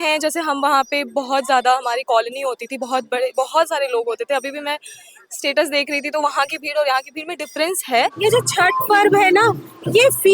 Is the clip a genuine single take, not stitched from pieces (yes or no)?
no